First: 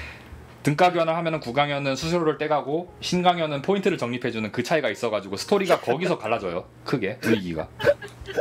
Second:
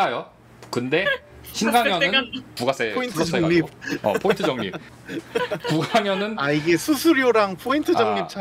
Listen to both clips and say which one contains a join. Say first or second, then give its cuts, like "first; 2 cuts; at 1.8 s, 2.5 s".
second; 2 cuts; at 2.5 s, 4.8 s